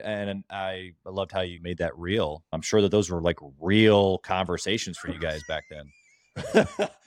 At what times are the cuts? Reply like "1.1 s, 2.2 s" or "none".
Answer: 1.6 s, 2.5 s